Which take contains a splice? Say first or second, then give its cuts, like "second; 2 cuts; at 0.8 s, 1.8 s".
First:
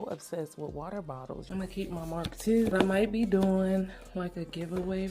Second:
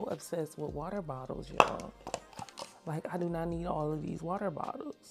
first; 2 cuts; at 1.4 s, 2.7 s